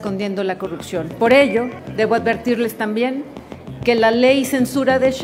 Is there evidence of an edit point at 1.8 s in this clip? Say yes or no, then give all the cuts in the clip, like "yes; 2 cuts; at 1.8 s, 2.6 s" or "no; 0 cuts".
yes; 1 cut; at 1.8 s